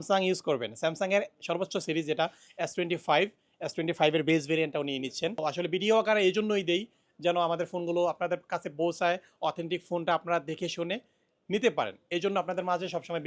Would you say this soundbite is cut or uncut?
cut